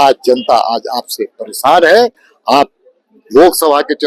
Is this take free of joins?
yes; 0 cuts

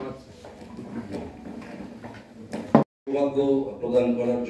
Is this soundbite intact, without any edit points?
yes; 0 cuts

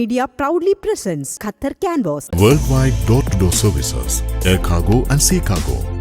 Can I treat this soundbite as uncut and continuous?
no; 1 cut; at 2.4 s

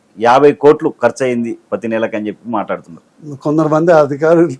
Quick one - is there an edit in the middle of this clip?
no; 0 cuts

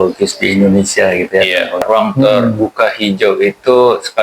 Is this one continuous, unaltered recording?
no; 1 cut; at 1.8 s

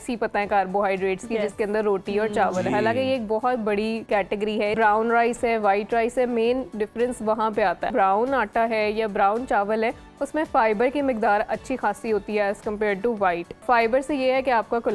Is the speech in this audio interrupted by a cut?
yes; 3 cuts; at 4.2 s, 7.9 s, 13.6 s

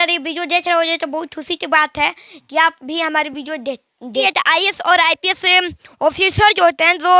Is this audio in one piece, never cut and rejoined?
no; 1 cut; at 4.2 s

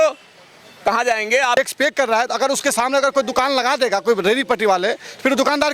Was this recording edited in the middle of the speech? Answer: yes; 1 cut; at 1.6 s

